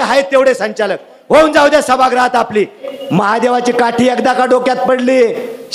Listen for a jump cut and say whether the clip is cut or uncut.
cut